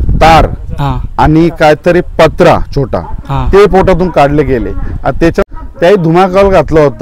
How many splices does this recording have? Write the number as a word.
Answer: one